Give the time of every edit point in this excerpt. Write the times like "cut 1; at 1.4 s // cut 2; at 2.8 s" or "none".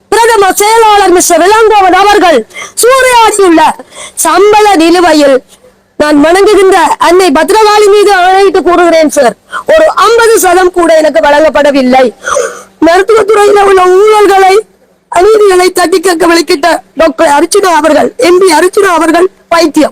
cut 1; at 3.9 s // cut 2; at 12.3 s